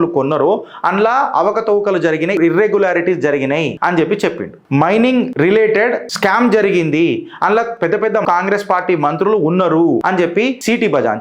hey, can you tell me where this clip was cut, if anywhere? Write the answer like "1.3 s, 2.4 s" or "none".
2.4 s, 3.7 s, 4.5 s, 5.3 s, 6.1 s, 8.2 s, 10.3 s